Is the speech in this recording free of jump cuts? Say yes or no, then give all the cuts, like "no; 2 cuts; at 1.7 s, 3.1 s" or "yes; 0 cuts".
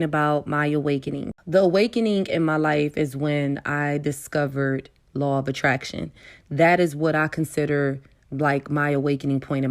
no; 1 cut; at 1.3 s